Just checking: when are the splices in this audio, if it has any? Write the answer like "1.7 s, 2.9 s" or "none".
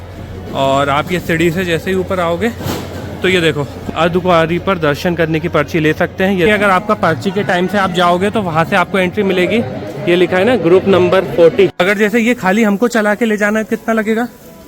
3.8 s, 6.5 s, 11.7 s